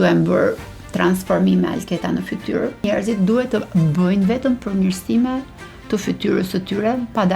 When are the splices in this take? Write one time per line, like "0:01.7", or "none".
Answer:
0:02.9